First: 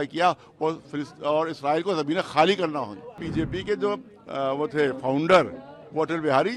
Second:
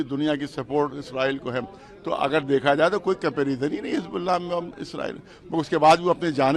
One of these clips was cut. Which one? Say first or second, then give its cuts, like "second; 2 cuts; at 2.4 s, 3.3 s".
first; 1 cut; at 3.2 s